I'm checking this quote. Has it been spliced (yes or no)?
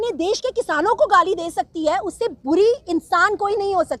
no